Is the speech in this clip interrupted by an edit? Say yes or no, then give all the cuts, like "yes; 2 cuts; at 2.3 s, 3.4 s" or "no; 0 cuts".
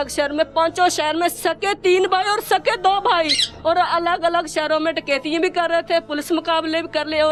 no; 0 cuts